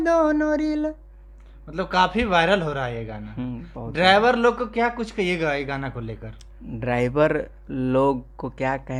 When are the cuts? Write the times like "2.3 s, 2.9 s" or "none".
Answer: none